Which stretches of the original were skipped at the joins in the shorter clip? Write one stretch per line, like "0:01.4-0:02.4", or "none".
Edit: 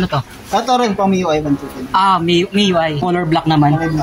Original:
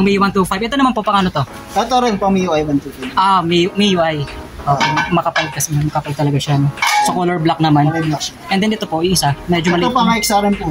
0:04.3-0:07.2